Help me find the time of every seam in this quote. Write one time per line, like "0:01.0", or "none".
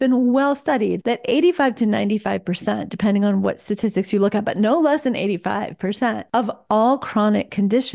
0:01.0
0:06.2